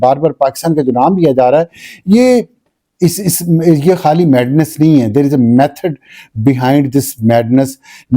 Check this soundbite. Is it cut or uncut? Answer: uncut